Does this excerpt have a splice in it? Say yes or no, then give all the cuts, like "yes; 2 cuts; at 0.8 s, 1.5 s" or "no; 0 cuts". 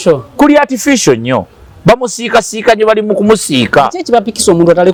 no; 0 cuts